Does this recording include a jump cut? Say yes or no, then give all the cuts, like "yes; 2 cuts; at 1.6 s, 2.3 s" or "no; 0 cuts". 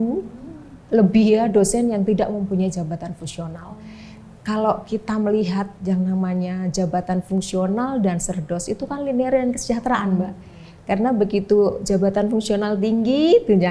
no; 0 cuts